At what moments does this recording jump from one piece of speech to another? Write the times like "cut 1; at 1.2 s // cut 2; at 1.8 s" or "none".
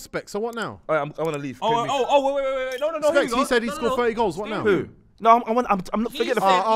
none